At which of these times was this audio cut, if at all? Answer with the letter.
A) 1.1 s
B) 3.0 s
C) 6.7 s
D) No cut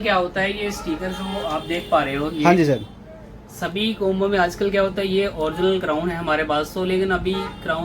D